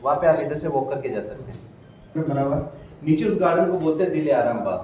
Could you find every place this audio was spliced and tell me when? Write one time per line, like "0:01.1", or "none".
none